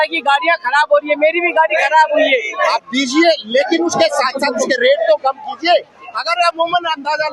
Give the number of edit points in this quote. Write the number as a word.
one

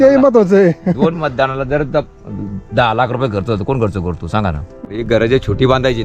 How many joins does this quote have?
one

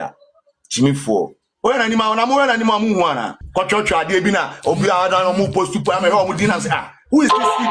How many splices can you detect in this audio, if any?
one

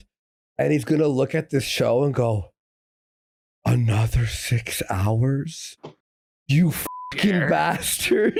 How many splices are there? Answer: zero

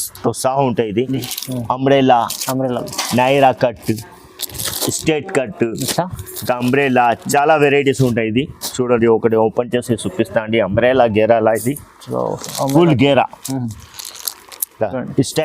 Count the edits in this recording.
one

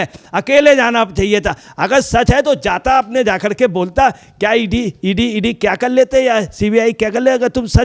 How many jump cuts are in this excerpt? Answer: zero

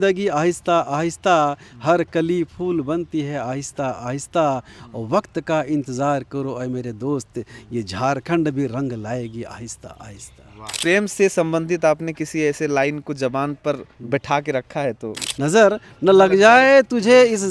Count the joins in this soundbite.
two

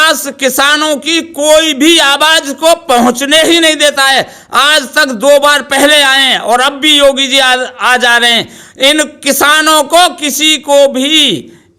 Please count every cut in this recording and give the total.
zero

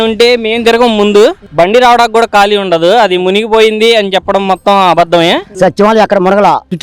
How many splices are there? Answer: one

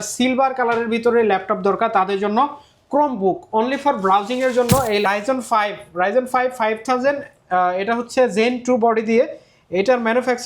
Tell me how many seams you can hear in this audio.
one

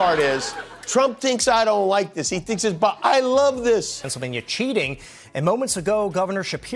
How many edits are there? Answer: one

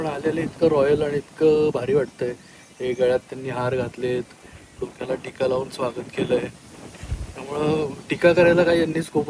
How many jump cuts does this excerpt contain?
zero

